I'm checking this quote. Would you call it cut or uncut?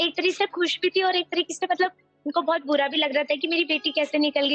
uncut